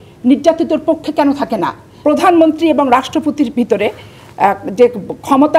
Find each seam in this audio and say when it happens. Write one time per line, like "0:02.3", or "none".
0:01.9